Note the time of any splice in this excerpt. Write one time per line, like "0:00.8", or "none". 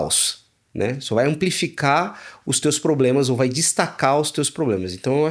none